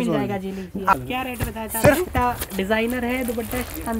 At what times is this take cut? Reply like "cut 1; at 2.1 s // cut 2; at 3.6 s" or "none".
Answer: cut 1; at 0.9 s // cut 2; at 2.1 s